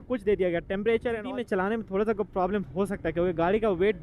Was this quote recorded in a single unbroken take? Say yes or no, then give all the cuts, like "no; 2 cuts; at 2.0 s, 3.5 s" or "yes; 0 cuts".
no; 1 cut; at 1.3 s